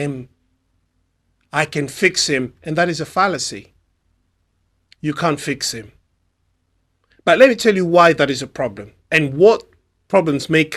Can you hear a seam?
no; 0 cuts

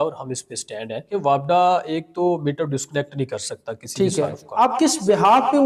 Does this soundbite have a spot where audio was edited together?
yes; 2 cuts; at 1.1 s, 4.5 s

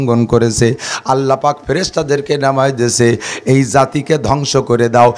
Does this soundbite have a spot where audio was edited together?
no; 0 cuts

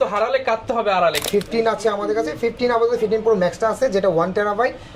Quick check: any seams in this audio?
yes; 1 cut; at 1.2 s

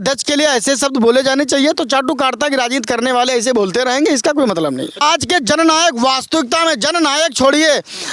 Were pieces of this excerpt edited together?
yes; 1 cut; at 5.0 s

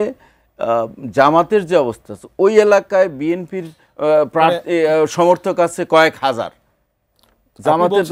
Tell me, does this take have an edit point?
no; 0 cuts

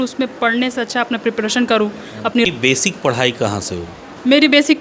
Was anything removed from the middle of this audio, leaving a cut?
yes; 1 cut; at 2.5 s

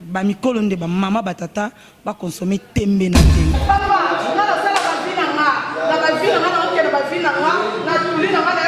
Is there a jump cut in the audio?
yes; 1 cut; at 3.5 s

